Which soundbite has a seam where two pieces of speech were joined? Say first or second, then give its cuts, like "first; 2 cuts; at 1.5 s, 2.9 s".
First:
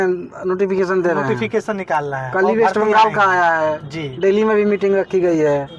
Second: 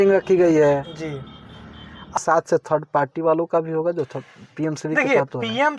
second; 1 cut; at 2.2 s